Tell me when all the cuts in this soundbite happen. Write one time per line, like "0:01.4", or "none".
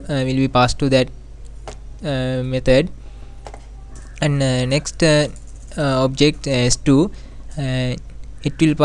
none